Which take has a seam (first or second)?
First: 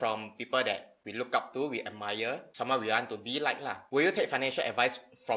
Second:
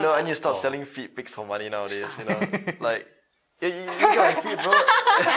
first